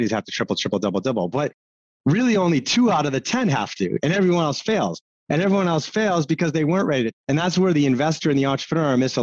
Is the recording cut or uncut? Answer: cut